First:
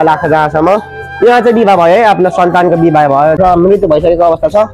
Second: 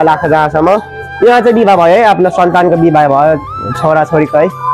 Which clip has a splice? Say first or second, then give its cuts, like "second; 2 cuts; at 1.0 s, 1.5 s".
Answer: first; 1 cut; at 3.4 s